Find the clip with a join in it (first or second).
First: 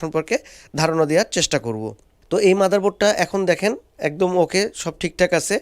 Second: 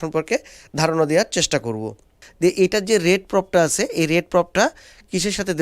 second